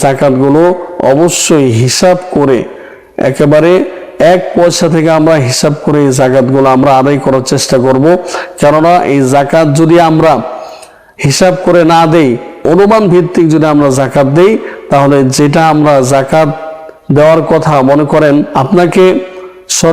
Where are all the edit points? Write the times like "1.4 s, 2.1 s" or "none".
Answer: 18.5 s